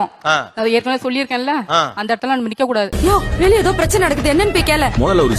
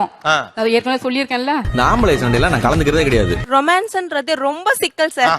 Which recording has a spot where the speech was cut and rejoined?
second; 2 cuts; at 1.7 s, 3.4 s

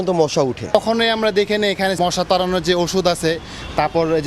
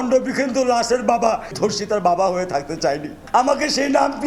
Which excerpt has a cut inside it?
first; 2 cuts; at 0.7 s, 1.9 s

